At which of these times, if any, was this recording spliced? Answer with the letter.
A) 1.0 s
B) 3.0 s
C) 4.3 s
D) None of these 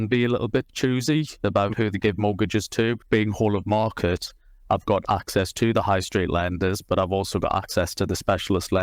B